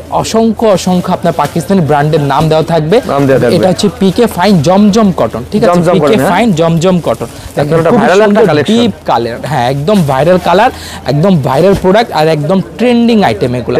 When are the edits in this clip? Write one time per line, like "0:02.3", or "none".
none